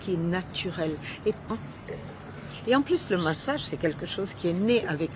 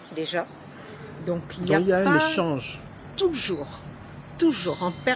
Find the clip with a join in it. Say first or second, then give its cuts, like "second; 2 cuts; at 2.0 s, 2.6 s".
first; 1 cut; at 1.5 s